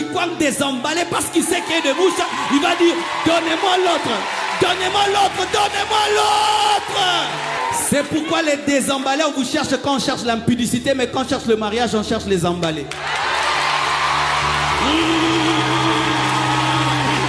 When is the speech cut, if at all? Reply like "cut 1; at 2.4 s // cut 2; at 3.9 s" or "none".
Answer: cut 1; at 7.6 s